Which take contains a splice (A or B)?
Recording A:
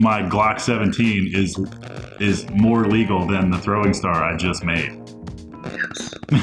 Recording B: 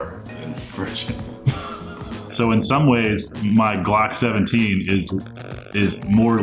B